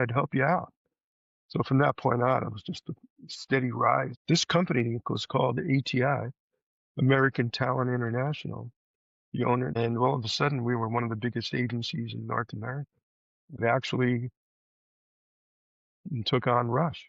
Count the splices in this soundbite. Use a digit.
3